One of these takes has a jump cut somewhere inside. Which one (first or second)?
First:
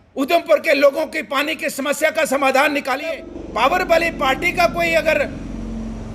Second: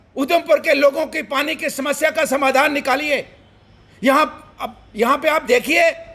first